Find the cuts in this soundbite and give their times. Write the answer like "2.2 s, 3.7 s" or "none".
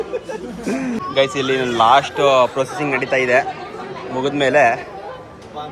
1.0 s